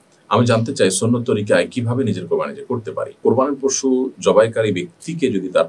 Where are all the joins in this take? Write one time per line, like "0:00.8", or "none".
0:03.1